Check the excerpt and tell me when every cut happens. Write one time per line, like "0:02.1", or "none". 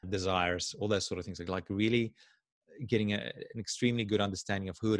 none